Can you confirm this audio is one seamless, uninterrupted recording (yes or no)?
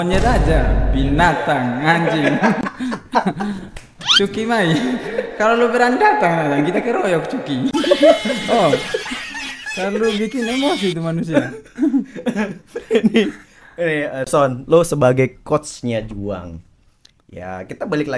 yes